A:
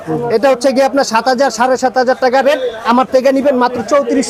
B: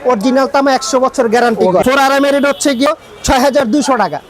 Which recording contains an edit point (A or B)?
B